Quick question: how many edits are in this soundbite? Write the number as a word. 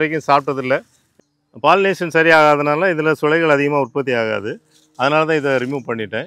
one